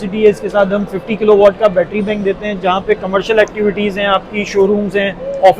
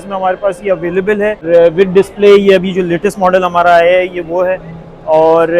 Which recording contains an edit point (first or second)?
second